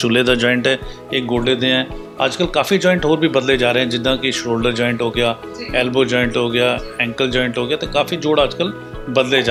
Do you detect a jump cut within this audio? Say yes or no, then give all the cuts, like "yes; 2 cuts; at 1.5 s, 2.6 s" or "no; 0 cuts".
no; 0 cuts